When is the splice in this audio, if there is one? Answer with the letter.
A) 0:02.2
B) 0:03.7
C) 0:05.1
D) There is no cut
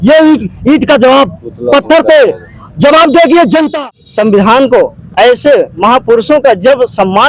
B